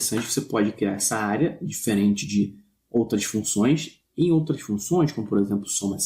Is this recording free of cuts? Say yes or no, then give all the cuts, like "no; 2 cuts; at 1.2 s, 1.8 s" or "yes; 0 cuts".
no; 1 cut; at 3.6 s